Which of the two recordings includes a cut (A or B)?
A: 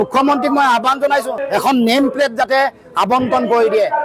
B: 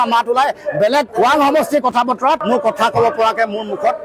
A